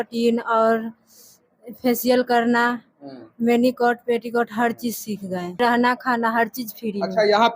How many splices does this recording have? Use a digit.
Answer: 1